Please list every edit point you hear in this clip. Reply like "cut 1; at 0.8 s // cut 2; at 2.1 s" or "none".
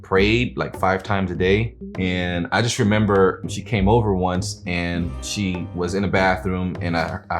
cut 1; at 1.8 s // cut 2; at 3.4 s // cut 3; at 5.3 s